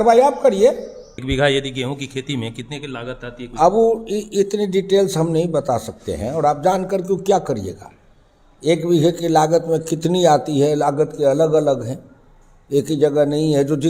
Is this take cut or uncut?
cut